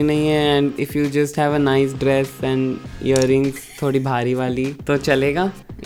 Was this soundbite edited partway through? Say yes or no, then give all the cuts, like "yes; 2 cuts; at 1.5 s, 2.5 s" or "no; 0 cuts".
no; 0 cuts